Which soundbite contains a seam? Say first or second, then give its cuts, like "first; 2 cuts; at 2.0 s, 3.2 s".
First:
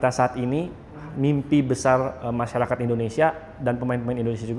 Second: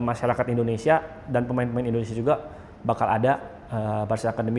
first; 1 cut; at 1.0 s